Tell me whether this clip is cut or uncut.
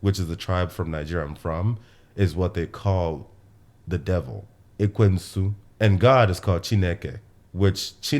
cut